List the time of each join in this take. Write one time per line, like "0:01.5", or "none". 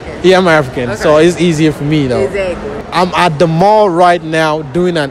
0:02.8